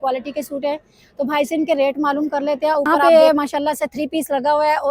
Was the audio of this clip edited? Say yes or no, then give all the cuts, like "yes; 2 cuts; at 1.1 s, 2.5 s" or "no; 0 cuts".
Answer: yes; 1 cut; at 3.1 s